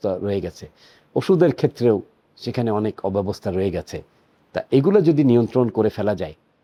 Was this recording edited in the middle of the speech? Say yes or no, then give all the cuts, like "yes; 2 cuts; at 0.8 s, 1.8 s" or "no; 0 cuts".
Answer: no; 0 cuts